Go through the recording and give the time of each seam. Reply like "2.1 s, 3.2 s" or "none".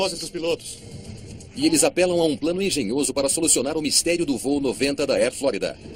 none